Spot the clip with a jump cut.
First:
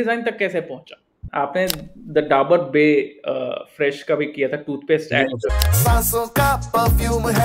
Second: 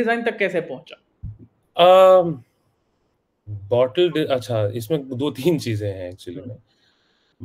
first; 2 cuts; at 1.2 s, 5.7 s

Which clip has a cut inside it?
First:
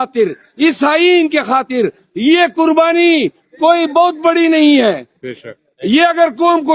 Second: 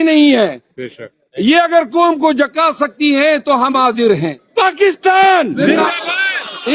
second; 1 cut; at 4.4 s

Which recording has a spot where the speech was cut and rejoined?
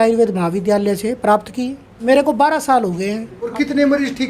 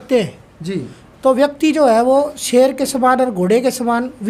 first; 2 cuts; at 1.8 s, 3.5 s

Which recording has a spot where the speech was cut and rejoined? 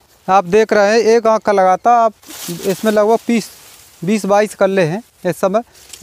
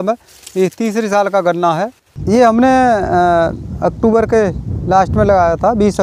second; 1 cut; at 2.1 s

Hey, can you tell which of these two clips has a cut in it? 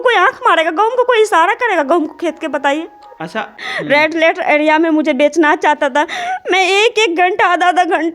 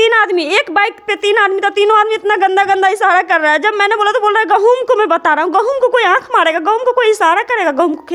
first; 1 cut; at 3.7 s

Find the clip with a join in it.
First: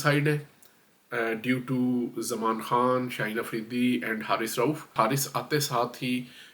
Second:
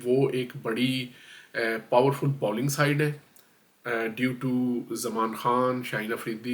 first; 1 cut; at 4.9 s

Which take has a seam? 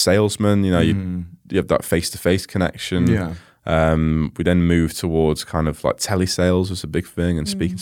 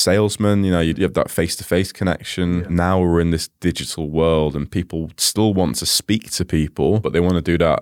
second; 3 cuts; at 0.9 s, 2.6 s, 7.0 s

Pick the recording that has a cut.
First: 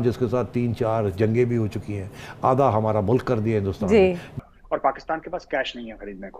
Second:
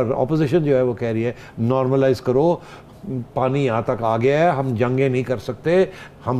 first; 1 cut; at 4.4 s

